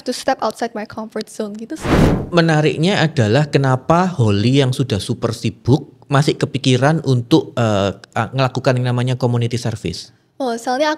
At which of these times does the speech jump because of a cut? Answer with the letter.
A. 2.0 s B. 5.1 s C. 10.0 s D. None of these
A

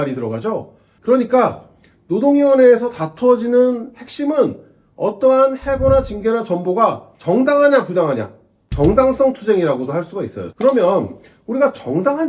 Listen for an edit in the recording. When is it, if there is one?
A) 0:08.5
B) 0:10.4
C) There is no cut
B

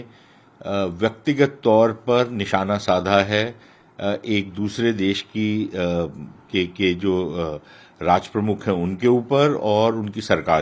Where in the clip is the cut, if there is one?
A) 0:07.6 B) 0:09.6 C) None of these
C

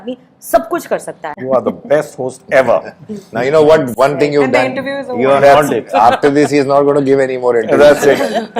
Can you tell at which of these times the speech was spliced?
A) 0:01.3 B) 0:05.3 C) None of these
A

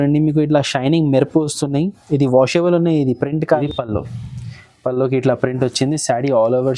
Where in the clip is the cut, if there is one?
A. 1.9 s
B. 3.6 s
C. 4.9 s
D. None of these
B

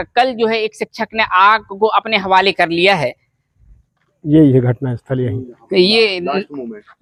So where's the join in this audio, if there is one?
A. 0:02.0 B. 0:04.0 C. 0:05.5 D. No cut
D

